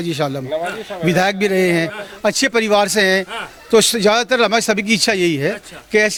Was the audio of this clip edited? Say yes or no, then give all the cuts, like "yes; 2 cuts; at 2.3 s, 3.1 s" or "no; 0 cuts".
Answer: no; 0 cuts